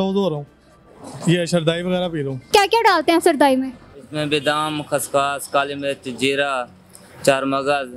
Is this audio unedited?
no; 1 cut; at 2.5 s

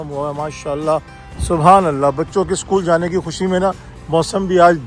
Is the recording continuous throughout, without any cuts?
yes; 0 cuts

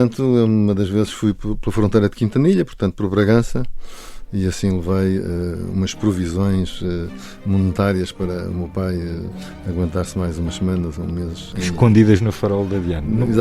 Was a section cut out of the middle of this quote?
yes; 1 cut; at 11.5 s

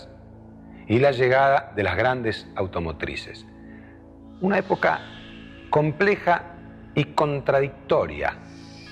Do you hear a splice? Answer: no; 0 cuts

